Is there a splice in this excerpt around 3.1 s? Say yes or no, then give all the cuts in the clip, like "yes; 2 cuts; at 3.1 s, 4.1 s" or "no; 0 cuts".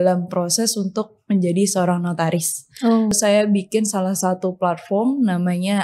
yes; 1 cut; at 3.1 s